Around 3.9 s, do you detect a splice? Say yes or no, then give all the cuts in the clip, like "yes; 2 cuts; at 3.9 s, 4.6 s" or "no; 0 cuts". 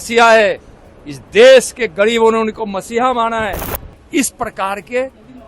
yes; 1 cut; at 3.9 s